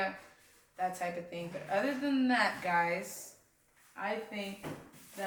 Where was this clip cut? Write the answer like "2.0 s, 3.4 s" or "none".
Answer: none